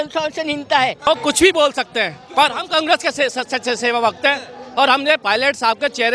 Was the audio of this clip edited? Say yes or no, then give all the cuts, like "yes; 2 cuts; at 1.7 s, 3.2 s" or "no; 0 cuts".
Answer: yes; 1 cut; at 1.1 s